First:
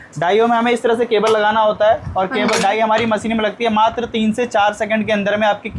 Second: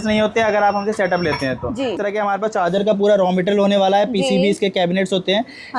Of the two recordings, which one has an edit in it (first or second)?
second